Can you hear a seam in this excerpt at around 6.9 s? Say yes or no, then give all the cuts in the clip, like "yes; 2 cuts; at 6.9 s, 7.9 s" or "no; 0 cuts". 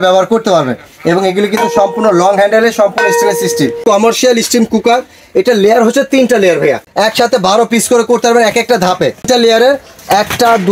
yes; 3 cuts; at 3.8 s, 6.9 s, 9.3 s